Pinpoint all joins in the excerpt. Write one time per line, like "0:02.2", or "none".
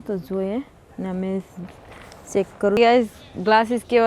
0:02.8